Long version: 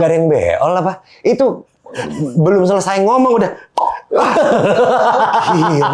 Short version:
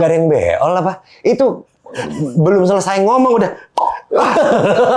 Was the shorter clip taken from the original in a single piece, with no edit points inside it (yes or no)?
yes